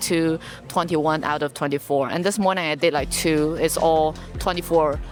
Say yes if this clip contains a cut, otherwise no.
no